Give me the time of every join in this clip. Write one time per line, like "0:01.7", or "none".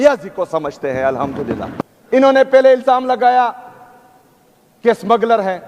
0:01.9